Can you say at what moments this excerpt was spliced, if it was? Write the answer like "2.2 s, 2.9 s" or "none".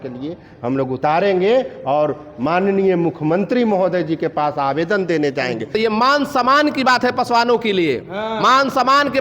5.7 s